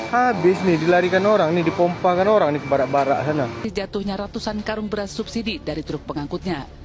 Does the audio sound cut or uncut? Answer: cut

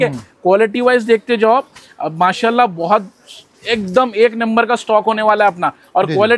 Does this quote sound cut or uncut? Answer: uncut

